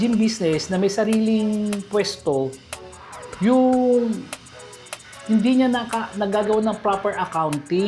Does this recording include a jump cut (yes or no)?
no